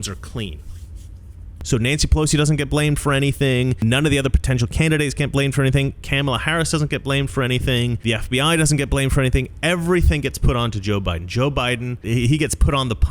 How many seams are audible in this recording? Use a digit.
4